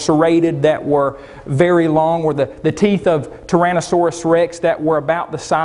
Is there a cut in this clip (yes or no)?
yes